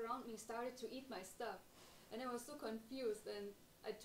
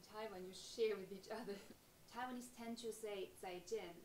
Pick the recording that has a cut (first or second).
second